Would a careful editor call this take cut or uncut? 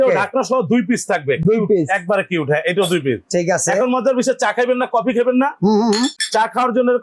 uncut